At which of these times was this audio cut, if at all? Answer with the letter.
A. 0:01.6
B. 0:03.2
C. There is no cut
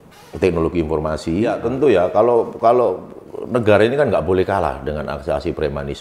A